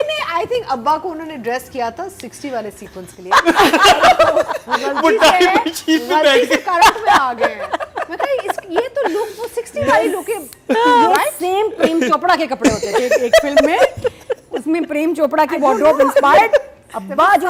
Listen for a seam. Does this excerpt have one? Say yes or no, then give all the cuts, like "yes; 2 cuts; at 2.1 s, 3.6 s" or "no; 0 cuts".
no; 0 cuts